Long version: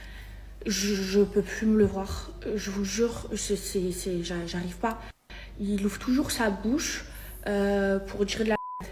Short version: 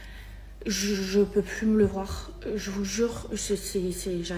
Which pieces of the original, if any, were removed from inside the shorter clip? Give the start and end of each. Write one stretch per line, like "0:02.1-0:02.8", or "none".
none